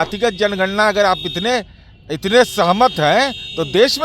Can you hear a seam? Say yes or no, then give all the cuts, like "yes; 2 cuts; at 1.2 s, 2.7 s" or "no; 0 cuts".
no; 0 cuts